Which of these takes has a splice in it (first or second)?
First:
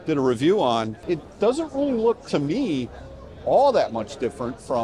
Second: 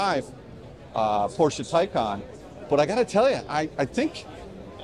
first